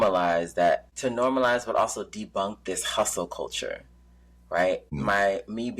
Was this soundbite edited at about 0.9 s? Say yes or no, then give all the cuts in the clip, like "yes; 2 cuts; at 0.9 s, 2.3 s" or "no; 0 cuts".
yes; 2 cuts; at 0.9 s, 4.9 s